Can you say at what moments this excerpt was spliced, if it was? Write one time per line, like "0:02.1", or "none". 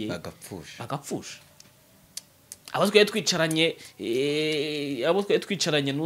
none